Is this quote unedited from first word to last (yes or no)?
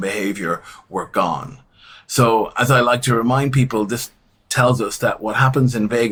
yes